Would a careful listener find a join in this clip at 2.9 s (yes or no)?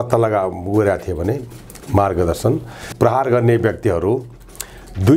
yes